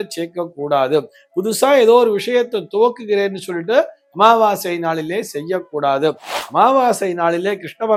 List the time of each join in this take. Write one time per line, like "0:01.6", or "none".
none